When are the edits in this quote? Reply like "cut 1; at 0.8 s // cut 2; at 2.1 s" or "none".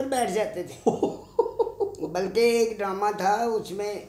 none